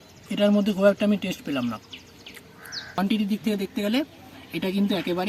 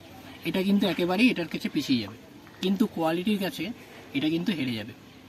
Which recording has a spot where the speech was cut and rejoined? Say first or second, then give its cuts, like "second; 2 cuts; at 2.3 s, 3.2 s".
first; 1 cut; at 3.0 s